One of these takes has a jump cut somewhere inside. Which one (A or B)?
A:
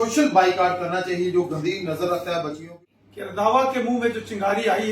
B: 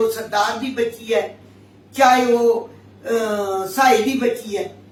A